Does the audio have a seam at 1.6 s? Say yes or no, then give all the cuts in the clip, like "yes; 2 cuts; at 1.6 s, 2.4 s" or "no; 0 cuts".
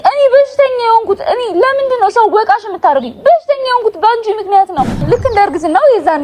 no; 1 cut; at 5.0 s